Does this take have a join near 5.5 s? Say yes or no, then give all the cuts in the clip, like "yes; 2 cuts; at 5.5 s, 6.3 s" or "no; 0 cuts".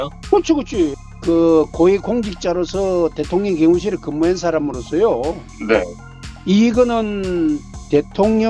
no; 1 cut; at 1.1 s